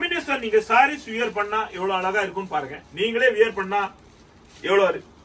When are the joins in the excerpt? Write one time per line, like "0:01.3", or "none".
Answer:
none

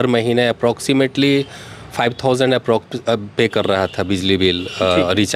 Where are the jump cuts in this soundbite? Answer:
none

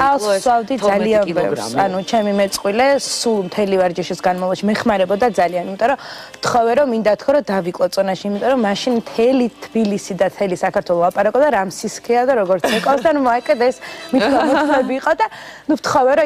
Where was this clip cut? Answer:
0:10.0

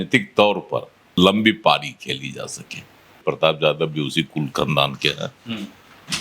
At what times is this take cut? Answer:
0:03.2

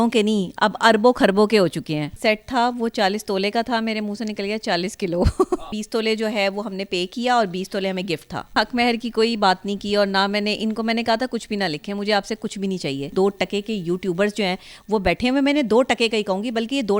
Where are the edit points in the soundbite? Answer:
0:02.1
0:05.7
0:08.5
0:13.1

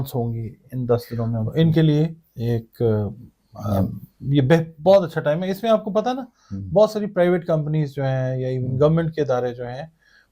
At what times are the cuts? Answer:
0:01.5

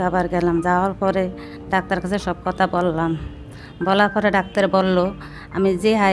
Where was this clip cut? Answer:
none

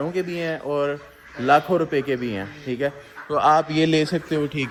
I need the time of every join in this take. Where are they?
none

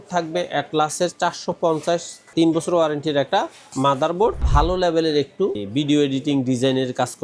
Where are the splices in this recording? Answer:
0:04.5
0:05.6

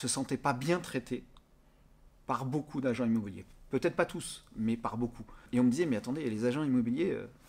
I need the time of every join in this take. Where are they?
0:05.5

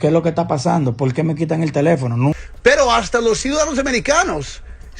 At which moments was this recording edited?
0:02.4

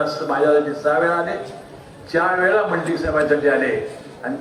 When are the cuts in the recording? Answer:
none

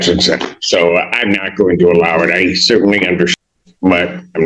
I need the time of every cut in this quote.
0:03.4

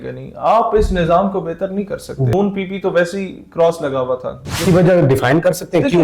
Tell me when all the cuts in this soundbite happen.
0:02.3
0:04.6

